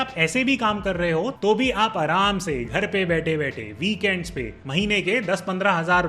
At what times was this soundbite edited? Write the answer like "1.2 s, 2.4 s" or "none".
4.6 s

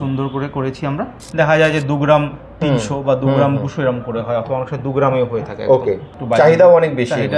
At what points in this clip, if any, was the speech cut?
1.2 s, 6.2 s

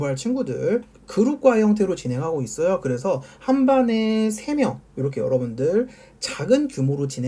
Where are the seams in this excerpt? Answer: 1.0 s

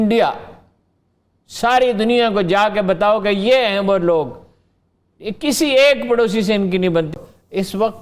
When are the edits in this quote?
7.1 s

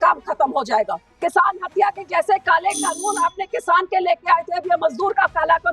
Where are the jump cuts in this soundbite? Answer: 1.1 s

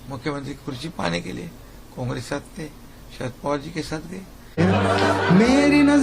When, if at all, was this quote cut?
4.6 s

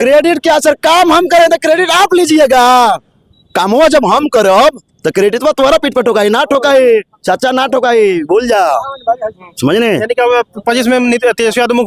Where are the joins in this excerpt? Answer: none

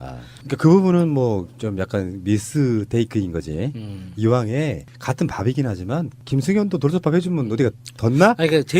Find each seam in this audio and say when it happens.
5.7 s

